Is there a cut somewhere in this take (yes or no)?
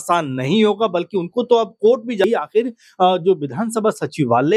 yes